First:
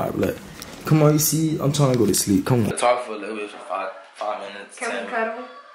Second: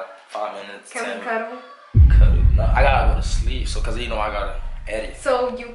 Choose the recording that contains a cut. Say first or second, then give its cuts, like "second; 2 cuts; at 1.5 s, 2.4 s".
first; 1 cut; at 2.8 s